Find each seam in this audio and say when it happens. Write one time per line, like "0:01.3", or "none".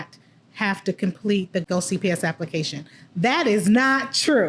0:01.6